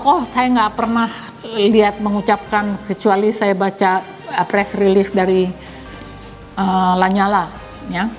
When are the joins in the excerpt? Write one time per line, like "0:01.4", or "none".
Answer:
none

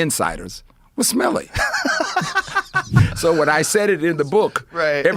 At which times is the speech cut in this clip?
0:02.9

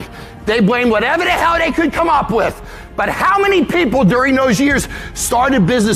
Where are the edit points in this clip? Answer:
none

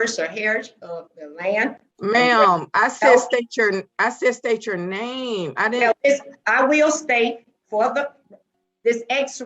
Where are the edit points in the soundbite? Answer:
0:01.9

